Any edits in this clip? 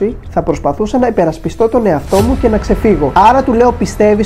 yes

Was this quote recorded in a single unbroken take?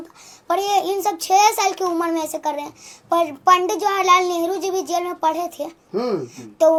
yes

